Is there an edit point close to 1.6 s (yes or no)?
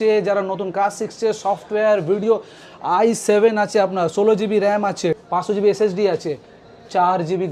no